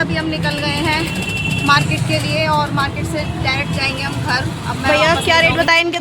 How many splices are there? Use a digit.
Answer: 1